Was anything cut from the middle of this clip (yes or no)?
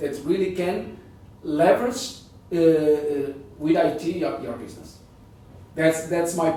no